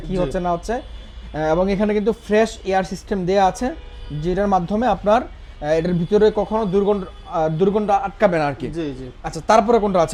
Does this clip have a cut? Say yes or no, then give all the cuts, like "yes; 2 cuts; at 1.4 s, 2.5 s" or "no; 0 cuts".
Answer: no; 0 cuts